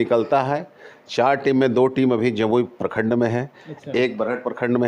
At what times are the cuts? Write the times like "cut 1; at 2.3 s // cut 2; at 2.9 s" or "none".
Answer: none